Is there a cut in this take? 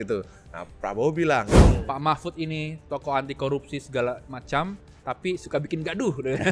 yes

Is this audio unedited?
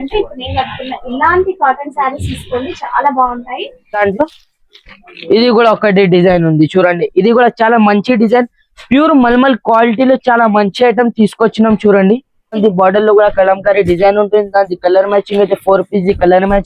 no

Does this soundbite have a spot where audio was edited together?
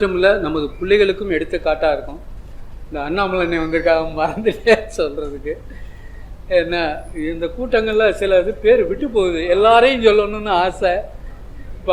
no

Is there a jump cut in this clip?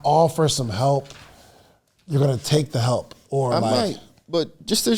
no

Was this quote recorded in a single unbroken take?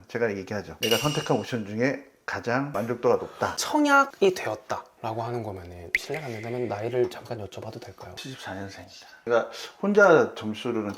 no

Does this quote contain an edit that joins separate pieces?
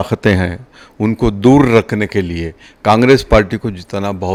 no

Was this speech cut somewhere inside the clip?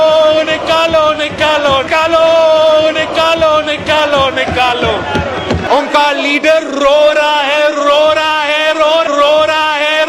no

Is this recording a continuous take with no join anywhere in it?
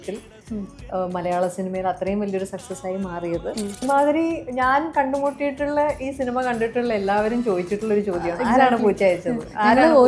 no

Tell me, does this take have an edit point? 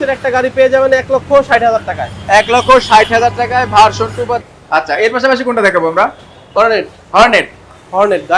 yes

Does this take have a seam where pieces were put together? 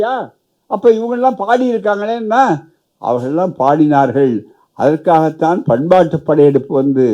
no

